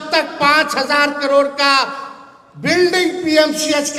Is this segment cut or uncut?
uncut